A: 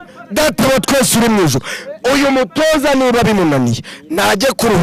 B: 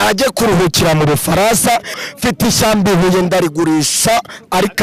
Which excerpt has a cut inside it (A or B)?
B